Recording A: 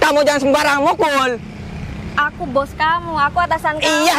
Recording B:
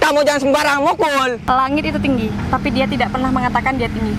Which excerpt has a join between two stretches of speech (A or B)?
B